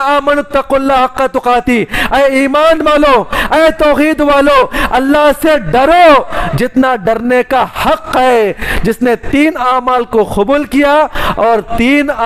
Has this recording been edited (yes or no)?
no